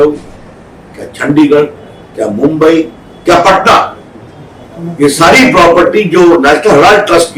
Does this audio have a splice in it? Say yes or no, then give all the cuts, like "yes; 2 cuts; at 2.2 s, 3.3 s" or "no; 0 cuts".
no; 0 cuts